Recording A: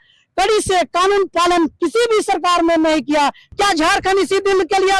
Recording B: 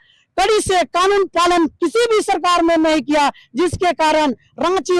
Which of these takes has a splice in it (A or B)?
A